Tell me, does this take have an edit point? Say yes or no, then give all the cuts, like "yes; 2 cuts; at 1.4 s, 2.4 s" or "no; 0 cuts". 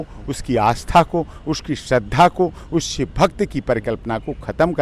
no; 0 cuts